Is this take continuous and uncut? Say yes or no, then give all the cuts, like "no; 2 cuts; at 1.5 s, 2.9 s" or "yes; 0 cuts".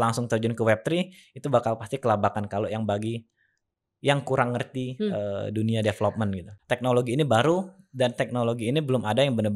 no; 1 cut; at 6.5 s